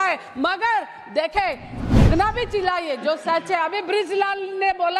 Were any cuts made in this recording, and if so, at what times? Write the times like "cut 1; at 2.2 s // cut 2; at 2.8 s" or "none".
cut 1; at 1.7 s